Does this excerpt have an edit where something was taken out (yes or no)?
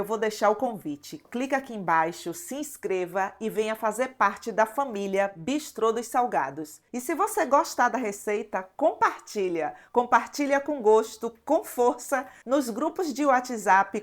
no